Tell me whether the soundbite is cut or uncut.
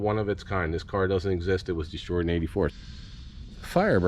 cut